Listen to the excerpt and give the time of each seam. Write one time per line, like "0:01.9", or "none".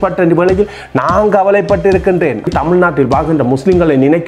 0:02.5

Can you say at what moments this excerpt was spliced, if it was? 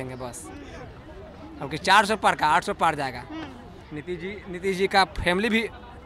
none

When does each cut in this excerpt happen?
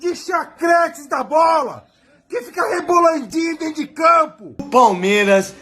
0:04.6

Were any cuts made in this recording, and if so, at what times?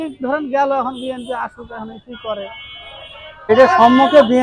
0:03.5

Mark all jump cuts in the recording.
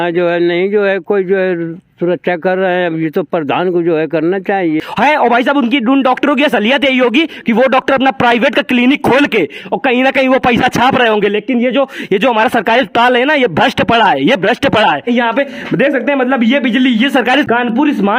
0:04.8
0:15.0
0:17.5

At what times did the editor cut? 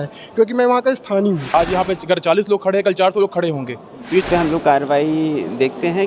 0:01.4
0:04.2

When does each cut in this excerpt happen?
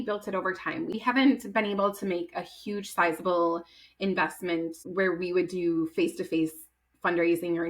0:00.9
0:04.8

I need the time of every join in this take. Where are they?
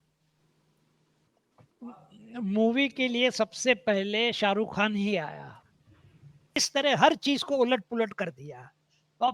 0:06.6

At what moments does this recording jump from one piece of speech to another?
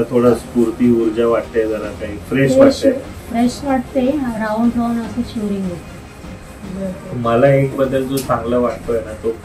0:06.3

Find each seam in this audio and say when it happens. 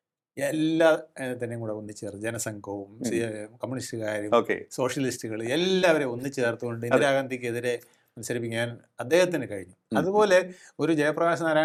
none

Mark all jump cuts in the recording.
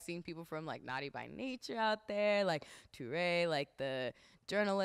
none

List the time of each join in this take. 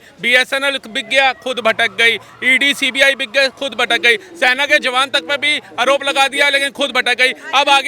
none

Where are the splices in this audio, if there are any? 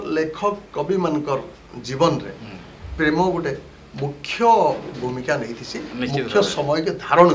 none

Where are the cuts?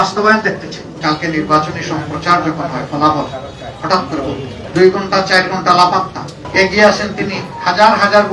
0:00.9
0:04.5

